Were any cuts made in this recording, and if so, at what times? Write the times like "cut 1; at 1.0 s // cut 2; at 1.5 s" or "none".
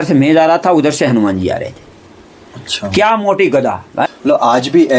cut 1; at 3.9 s